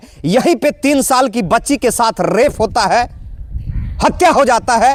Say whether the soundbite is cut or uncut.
uncut